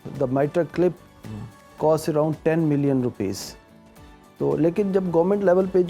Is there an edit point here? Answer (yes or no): no